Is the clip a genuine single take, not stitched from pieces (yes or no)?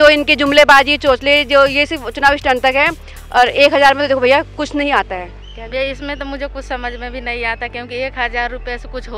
yes